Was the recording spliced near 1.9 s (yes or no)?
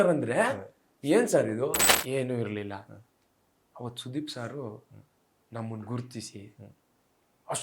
yes